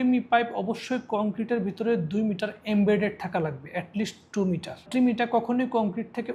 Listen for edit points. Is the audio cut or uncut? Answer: uncut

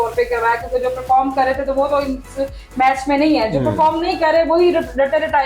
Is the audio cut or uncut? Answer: uncut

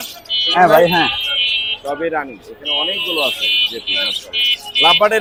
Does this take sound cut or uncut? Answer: uncut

